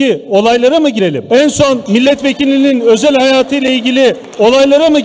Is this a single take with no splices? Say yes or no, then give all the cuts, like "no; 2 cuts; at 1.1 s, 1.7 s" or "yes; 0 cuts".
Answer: no; 2 cuts; at 1.2 s, 1.8 s